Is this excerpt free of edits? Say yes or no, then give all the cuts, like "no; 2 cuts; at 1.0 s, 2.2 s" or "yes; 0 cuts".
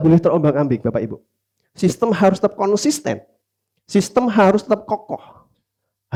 yes; 0 cuts